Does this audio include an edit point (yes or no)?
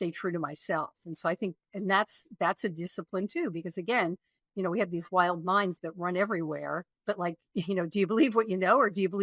no